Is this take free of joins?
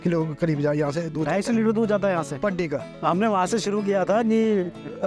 no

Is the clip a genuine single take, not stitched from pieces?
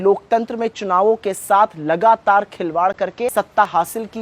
no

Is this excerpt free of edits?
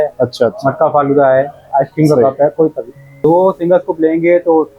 no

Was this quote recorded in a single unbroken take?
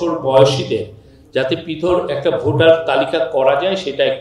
yes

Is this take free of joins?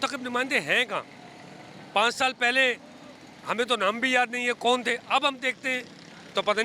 yes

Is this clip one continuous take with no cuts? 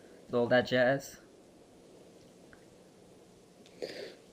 yes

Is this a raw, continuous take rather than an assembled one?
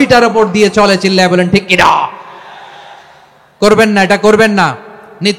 yes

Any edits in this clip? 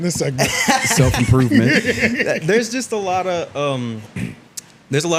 no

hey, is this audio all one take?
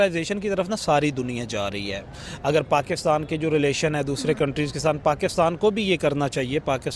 yes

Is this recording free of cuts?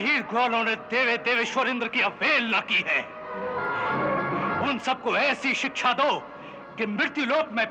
yes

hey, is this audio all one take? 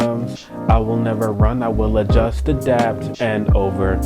yes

